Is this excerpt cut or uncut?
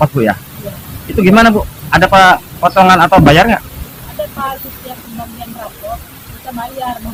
uncut